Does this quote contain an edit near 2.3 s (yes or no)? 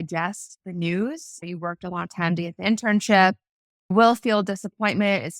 no